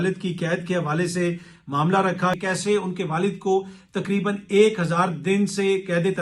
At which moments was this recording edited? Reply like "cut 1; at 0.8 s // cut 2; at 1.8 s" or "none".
cut 1; at 2.4 s